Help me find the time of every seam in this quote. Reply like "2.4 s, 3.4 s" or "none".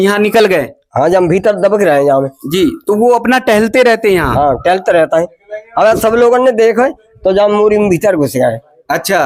none